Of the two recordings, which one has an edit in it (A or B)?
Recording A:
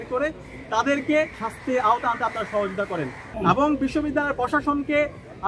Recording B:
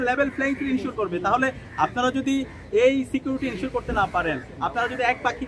A